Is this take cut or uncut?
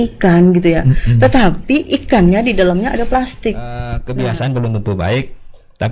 cut